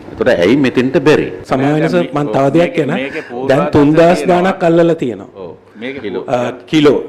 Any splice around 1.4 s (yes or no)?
no